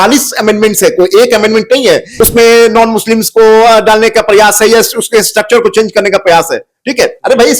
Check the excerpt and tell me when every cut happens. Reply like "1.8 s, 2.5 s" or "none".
2.1 s